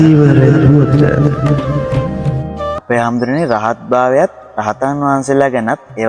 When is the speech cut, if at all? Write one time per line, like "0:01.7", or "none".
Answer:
0:02.8

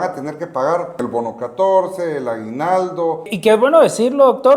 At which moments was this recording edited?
0:01.0
0:03.3

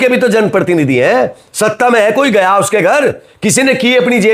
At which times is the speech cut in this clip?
none

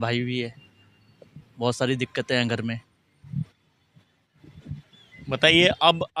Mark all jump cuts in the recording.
none

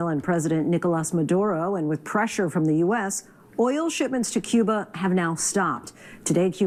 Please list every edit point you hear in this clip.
none

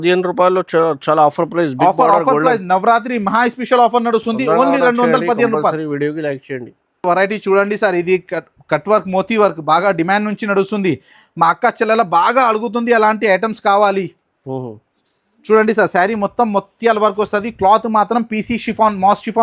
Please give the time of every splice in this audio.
none

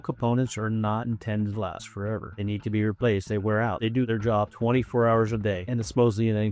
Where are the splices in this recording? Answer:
0:04.0
0:05.6

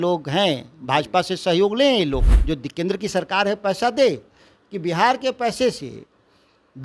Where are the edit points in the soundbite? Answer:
0:02.3

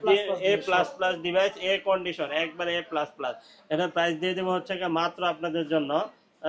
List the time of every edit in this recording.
none

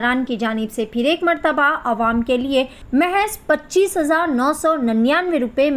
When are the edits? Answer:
0:02.8

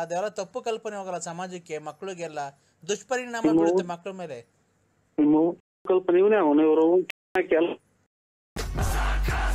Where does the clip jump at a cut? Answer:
0:08.4

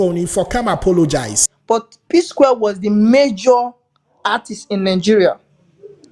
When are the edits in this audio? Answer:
0:01.6

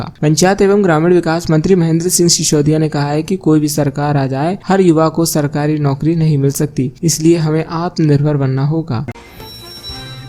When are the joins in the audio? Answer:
0:09.1

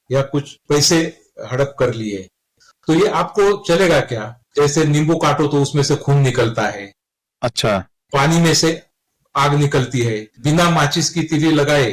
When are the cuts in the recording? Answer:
0:04.4
0:10.3

